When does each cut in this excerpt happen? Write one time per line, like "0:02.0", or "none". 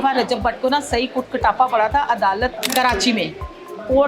0:02.6

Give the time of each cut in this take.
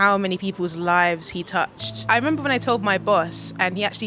0:02.0

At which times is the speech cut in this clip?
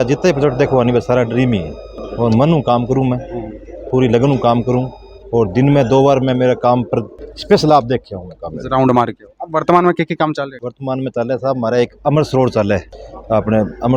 none

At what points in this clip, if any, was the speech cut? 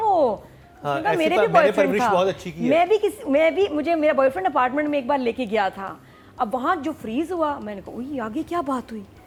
none

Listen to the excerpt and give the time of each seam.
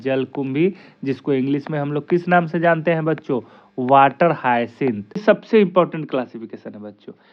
0:05.1

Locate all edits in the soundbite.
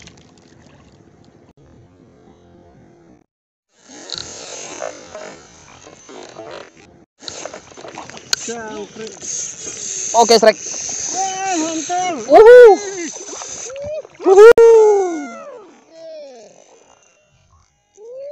none

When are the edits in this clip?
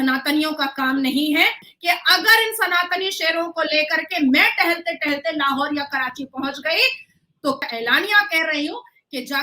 0:01.6
0:07.6

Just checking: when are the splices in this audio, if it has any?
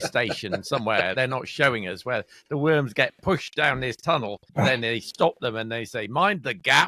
0:01.1
0:04.5

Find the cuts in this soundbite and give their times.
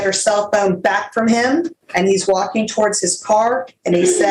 0:01.8

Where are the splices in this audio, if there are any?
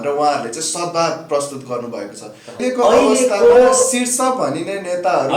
0:02.6

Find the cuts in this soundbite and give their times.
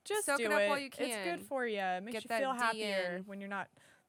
none

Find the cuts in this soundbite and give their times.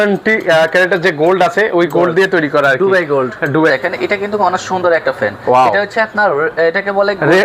0:03.7

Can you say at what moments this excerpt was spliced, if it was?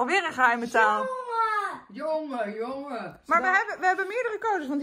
0:03.1

